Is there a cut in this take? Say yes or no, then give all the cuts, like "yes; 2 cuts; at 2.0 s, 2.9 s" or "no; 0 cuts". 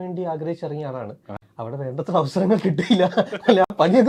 no; 0 cuts